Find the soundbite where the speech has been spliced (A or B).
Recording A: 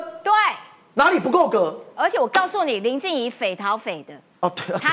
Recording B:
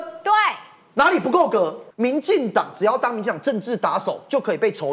B